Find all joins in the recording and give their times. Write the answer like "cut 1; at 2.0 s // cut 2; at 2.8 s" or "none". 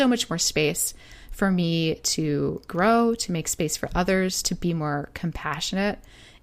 cut 1; at 2.6 s